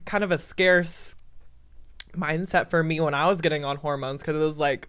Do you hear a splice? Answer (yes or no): no